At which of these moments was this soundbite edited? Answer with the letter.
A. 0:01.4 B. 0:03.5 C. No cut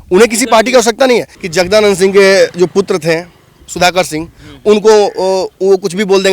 A